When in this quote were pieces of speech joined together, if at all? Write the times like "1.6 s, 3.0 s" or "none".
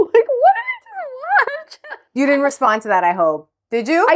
none